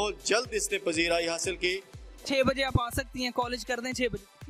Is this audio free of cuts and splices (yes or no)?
no